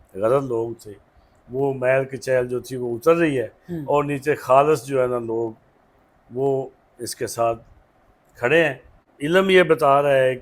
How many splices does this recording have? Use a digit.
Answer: 1